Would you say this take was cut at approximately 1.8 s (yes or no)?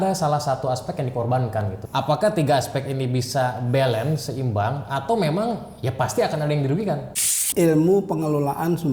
yes